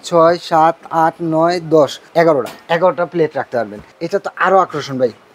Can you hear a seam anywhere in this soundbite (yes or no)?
yes